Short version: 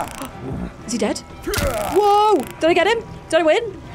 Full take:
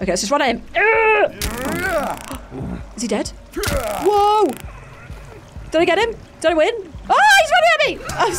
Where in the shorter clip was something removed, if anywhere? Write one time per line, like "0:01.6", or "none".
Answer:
0:02.5